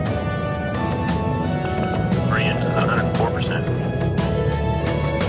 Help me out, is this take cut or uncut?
uncut